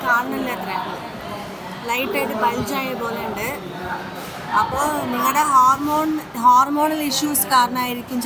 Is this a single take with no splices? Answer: yes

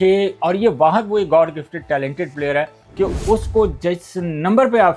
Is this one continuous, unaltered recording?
yes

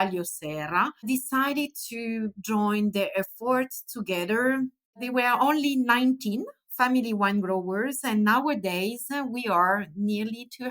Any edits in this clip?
yes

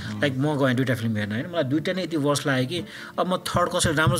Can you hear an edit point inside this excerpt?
no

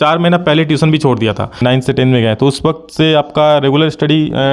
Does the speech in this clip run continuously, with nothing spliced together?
no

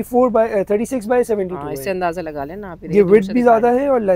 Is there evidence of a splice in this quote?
no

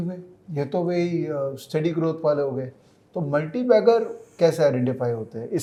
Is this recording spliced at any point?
no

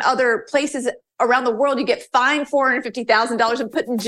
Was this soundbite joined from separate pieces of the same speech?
no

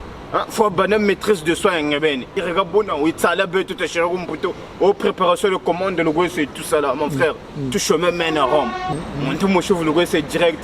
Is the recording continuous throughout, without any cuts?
no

